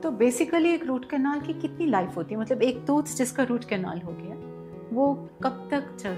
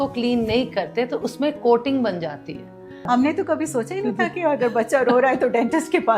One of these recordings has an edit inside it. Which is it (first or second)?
second